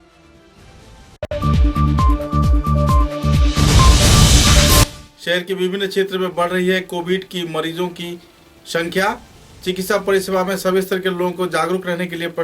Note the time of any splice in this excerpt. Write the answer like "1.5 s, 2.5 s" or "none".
1.2 s, 4.8 s